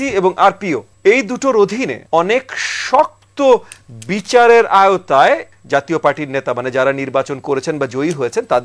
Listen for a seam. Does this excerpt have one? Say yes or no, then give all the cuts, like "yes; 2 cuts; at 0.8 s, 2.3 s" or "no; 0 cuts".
yes; 3 cuts; at 0.9 s, 2.0 s, 5.5 s